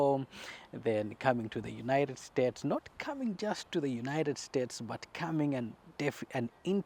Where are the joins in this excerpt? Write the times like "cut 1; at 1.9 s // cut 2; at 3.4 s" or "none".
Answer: none